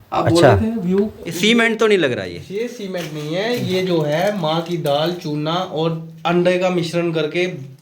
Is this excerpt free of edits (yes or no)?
no